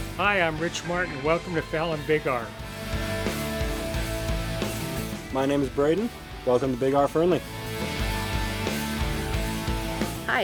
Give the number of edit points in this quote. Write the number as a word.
zero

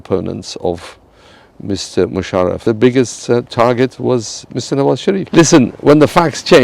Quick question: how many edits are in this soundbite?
two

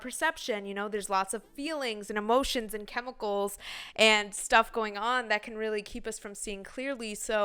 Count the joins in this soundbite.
zero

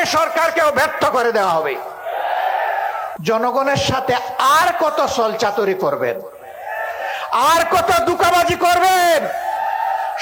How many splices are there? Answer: one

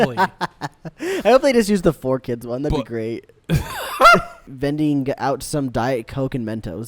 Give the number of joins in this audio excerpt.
one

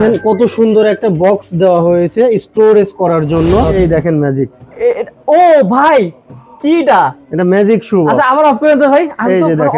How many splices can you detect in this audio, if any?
one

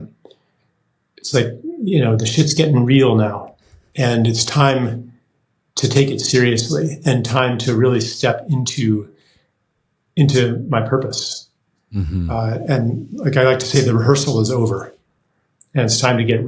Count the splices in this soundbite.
zero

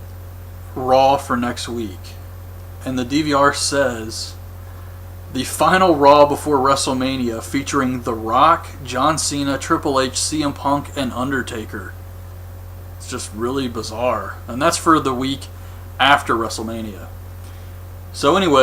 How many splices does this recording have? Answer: two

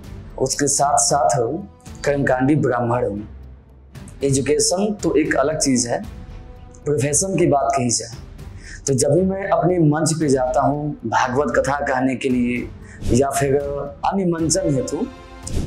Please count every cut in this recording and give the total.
one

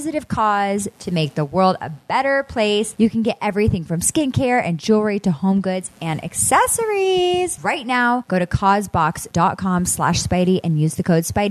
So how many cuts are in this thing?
three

